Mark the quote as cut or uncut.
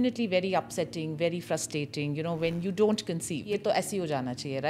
cut